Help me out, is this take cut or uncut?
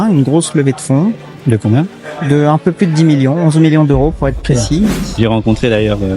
cut